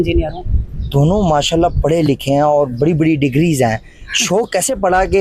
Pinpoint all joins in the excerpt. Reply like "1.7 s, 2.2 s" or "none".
none